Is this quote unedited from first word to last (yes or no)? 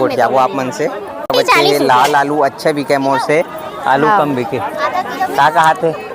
no